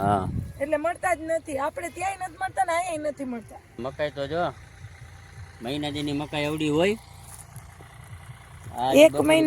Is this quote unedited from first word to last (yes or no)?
no